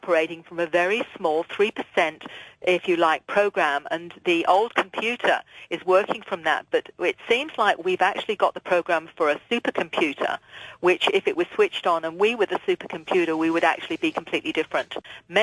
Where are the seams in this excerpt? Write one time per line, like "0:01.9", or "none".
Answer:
0:11.1